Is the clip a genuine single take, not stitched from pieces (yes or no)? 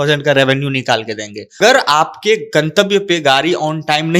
no